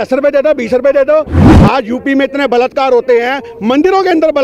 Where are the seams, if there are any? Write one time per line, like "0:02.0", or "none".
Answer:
0:01.4